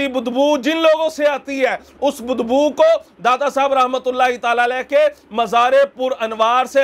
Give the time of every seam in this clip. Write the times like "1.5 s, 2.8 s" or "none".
none